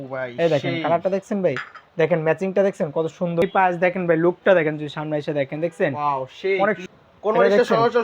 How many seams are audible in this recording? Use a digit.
2